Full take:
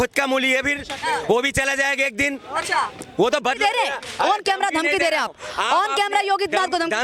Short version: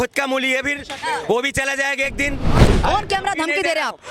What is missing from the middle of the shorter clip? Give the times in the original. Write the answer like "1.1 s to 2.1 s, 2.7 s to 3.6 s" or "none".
2.6 s to 4.0 s